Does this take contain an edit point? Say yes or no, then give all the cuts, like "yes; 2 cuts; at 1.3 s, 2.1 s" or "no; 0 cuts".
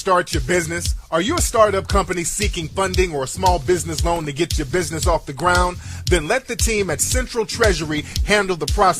yes; 1 cut; at 5.5 s